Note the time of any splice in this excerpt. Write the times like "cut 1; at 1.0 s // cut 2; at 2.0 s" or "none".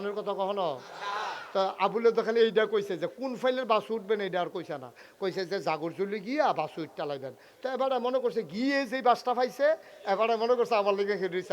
none